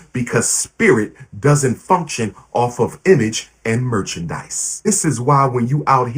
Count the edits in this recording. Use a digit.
1